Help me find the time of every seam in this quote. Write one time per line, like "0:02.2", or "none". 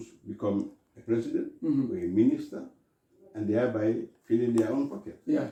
none